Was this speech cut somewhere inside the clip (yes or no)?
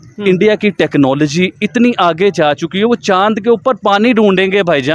no